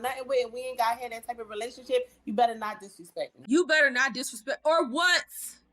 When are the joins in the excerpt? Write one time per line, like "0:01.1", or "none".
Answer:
0:03.3